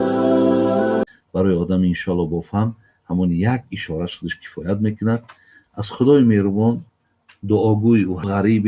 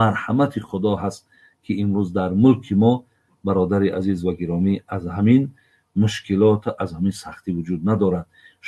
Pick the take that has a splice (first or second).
first